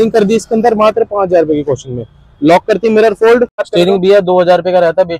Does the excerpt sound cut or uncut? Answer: cut